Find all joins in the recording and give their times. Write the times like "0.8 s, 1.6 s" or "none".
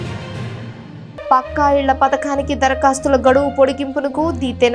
1.0 s